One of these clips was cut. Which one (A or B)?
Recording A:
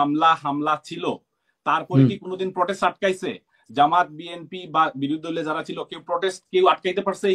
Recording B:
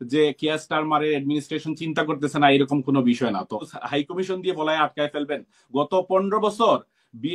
B